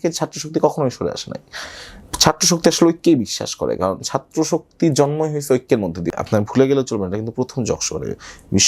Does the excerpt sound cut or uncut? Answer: cut